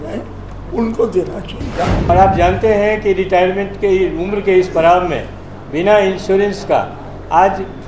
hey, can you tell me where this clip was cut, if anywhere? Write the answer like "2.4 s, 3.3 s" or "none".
2.0 s